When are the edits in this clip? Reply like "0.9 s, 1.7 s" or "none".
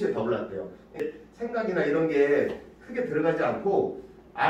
1.0 s